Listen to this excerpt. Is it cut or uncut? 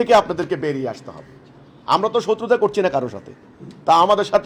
uncut